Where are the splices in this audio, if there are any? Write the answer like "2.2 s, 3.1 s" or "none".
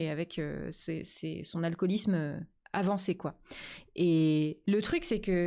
4.6 s